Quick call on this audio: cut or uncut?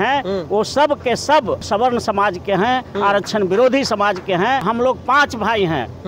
cut